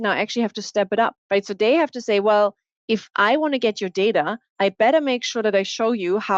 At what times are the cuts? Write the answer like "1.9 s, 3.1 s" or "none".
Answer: 1.2 s, 4.4 s